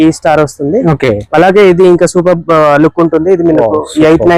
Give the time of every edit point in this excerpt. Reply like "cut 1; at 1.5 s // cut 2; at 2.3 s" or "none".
none